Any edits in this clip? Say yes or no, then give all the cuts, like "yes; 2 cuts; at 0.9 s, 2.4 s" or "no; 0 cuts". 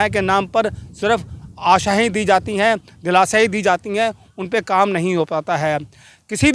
no; 0 cuts